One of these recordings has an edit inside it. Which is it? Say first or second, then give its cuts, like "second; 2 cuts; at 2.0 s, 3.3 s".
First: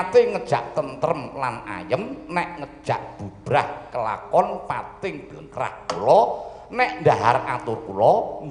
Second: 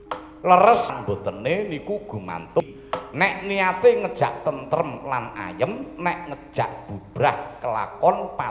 second; 2 cuts; at 1.0 s, 2.6 s